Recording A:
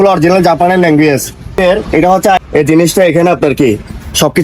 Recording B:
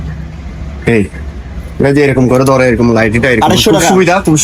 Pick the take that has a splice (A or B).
A